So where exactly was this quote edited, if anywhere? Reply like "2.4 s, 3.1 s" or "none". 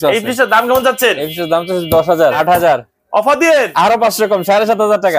2.4 s